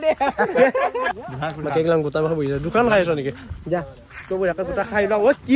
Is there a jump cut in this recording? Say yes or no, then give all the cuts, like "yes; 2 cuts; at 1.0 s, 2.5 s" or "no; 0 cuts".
yes; 1 cut; at 1.2 s